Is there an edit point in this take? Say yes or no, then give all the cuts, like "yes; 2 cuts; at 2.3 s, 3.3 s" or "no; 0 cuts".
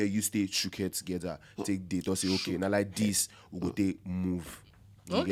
no; 0 cuts